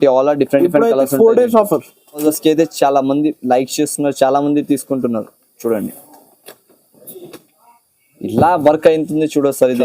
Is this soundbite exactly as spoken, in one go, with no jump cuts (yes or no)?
no